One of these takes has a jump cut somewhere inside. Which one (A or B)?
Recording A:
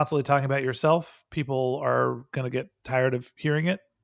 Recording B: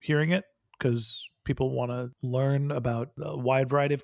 B